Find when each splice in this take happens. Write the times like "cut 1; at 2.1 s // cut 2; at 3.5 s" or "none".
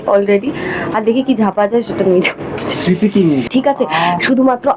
cut 1; at 3.5 s